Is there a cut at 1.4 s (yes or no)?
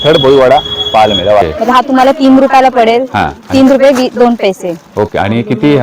yes